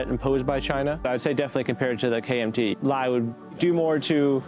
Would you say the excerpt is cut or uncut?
cut